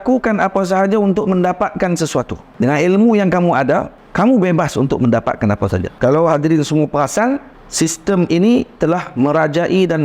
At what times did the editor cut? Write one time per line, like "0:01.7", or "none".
0:02.4
0:04.0
0:05.9
0:07.6

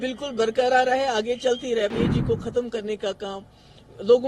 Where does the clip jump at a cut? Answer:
0:01.9

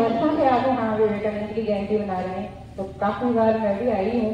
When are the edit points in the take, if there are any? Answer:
none

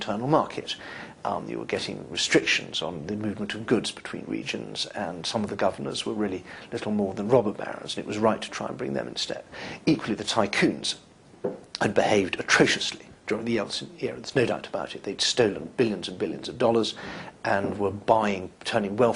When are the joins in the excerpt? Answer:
none

